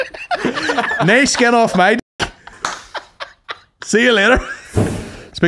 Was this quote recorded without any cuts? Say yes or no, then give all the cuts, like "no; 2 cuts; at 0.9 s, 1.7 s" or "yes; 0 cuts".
no; 1 cut; at 4.6 s